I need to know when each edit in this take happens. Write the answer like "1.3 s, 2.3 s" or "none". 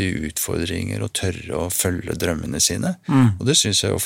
none